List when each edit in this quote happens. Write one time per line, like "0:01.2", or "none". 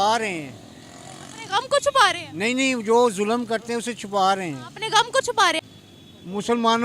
0:05.7